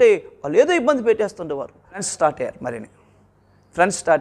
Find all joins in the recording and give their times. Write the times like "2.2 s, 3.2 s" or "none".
2.1 s